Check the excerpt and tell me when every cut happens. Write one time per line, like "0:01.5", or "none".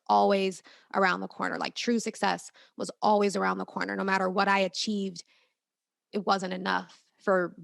none